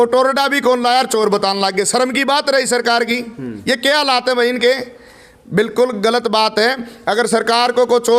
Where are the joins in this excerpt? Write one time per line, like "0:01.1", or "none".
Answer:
none